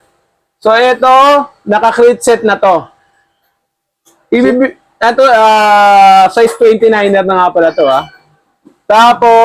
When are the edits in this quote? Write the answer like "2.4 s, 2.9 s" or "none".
none